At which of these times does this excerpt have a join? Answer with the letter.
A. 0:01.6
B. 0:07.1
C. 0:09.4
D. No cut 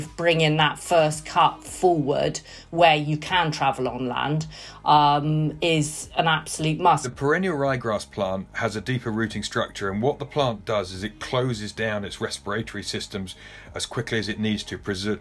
B